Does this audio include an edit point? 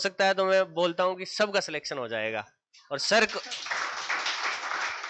no; 0 cuts

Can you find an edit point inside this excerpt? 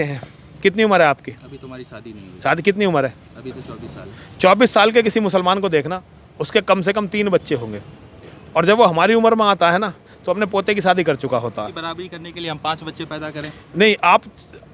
yes; 1 cut; at 11.7 s

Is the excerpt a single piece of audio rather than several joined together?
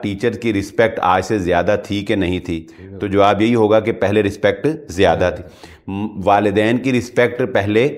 yes; 0 cuts

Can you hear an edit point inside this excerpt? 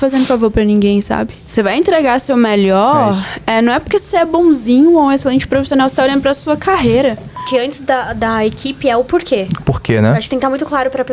yes; 2 cuts; at 1.4 s, 7.4 s

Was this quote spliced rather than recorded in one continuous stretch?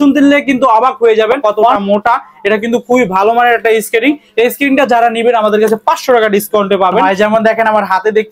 yes; 2 cuts; at 1.7 s, 7.0 s

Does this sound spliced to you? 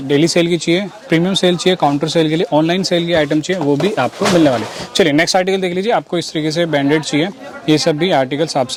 no; 0 cuts

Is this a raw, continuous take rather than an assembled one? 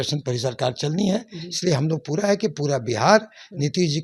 yes; 0 cuts

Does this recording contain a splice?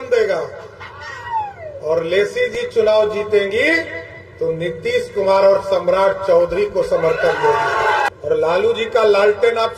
yes; 1 cut; at 8.1 s

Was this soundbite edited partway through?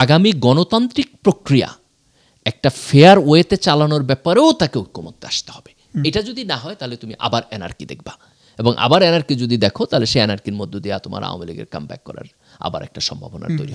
no; 0 cuts

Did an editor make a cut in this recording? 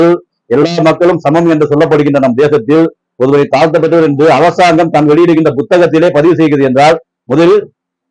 no; 0 cuts

